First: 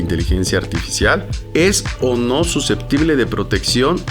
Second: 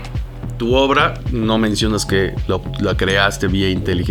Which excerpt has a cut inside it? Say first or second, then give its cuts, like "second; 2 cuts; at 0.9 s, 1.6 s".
first; 1 cut; at 1.4 s